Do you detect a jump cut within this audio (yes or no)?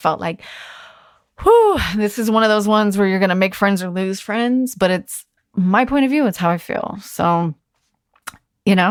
no